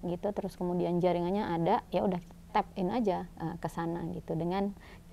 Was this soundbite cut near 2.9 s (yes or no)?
no